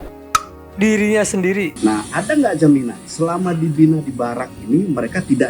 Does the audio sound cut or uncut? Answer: cut